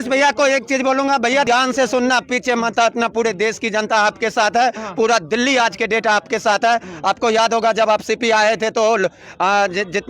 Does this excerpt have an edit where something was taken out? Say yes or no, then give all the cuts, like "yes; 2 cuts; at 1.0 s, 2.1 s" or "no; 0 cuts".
yes; 1 cut; at 1.4 s